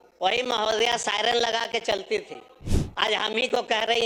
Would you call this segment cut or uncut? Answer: uncut